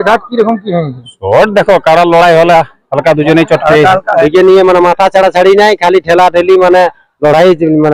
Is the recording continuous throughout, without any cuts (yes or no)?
no